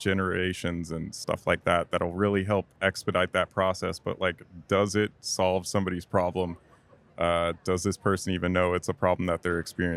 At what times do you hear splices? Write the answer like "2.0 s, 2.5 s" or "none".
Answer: none

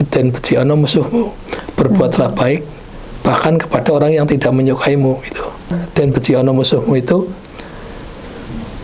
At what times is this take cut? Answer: 5.7 s

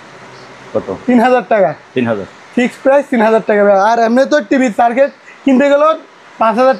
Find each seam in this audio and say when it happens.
none

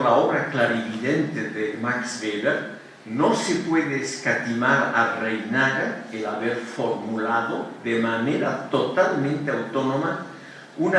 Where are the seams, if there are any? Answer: 8.5 s

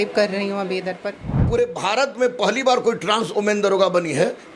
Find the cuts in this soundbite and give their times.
1.4 s

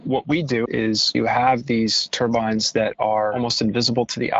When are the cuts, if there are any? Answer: 1.0 s, 2.0 s, 3.3 s

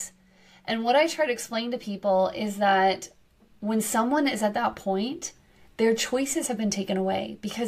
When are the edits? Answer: none

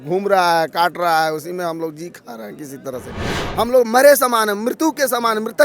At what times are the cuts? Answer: 3.4 s

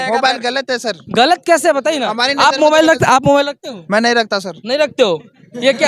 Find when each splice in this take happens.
none

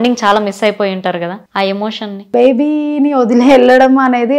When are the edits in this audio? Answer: 1.4 s, 2.2 s

